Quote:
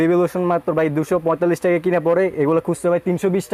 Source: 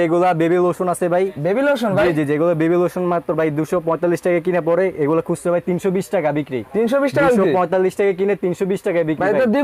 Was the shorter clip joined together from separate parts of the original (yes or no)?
no